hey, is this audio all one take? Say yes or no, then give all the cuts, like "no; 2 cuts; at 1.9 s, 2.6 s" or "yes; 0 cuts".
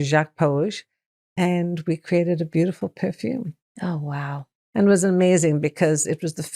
no; 1 cut; at 3.6 s